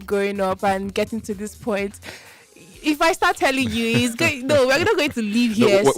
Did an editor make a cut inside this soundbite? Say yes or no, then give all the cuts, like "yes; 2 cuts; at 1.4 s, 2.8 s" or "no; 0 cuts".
no; 0 cuts